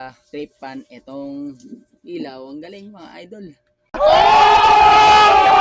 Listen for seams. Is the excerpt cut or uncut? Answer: uncut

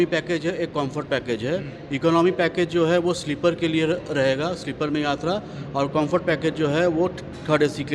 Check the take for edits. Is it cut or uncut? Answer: uncut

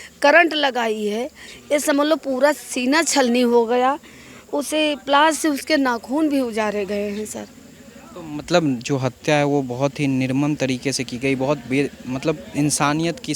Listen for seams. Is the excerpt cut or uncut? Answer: uncut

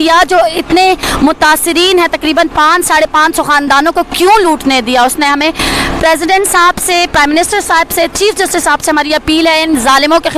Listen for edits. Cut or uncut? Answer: uncut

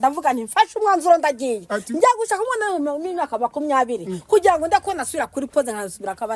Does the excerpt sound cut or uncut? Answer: uncut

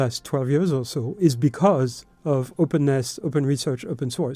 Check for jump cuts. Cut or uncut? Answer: uncut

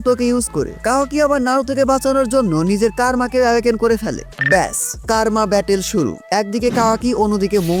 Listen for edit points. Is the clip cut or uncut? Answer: uncut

